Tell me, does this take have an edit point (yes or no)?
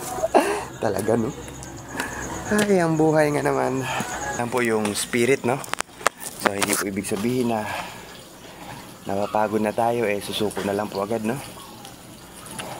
yes